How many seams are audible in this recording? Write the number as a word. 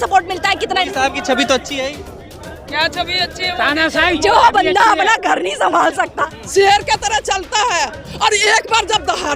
two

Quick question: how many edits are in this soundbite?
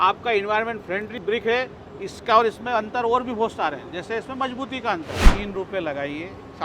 two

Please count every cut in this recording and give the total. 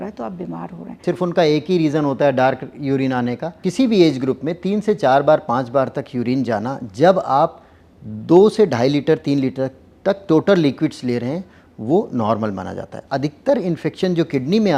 three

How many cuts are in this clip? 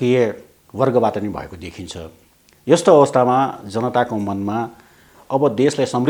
zero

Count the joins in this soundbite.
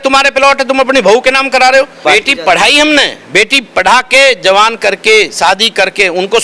one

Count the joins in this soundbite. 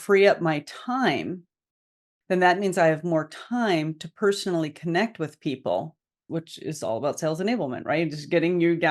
one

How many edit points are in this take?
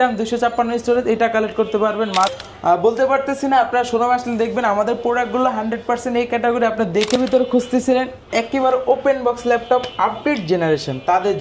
two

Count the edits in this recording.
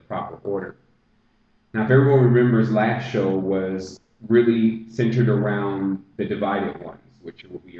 zero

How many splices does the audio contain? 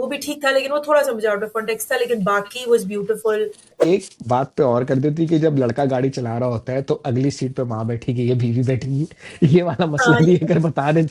one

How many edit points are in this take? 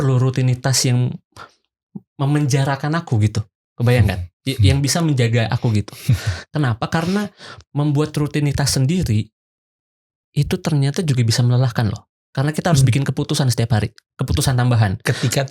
zero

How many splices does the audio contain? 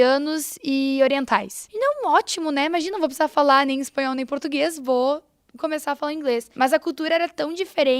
two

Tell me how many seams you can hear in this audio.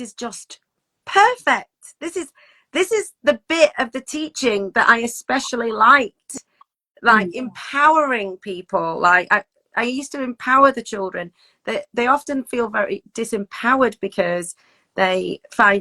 zero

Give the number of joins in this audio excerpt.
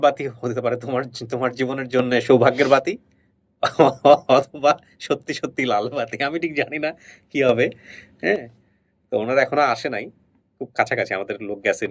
zero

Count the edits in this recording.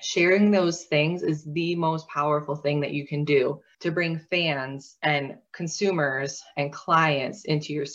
one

